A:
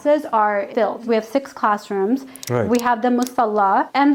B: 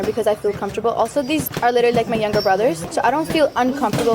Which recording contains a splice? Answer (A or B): B